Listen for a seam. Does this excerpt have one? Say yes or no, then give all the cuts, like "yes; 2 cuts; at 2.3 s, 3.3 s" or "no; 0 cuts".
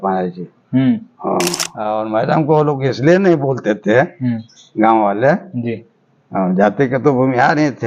yes; 1 cut; at 1.8 s